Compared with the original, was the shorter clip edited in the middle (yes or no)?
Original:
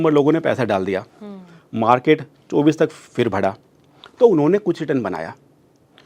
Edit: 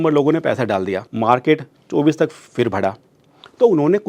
yes